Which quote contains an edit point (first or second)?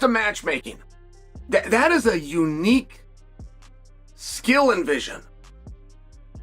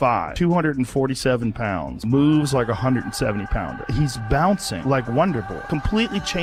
first